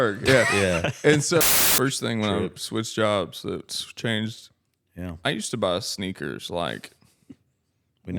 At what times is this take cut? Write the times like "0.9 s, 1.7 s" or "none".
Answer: 1.4 s